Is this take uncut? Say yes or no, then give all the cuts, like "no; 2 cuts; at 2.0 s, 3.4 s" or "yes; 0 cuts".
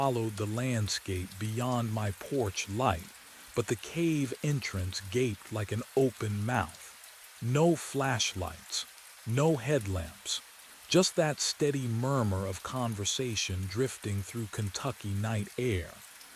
no; 1 cut; at 4.9 s